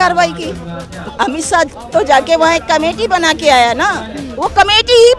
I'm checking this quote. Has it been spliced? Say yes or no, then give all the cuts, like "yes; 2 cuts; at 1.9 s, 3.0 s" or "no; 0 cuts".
yes; 1 cut; at 1.0 s